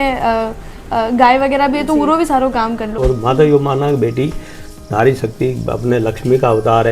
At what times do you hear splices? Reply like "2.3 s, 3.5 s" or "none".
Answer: 3.0 s